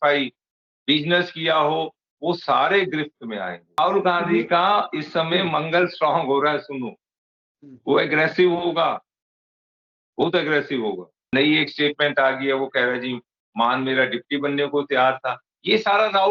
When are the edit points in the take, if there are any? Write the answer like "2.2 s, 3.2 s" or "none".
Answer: 3.8 s, 11.3 s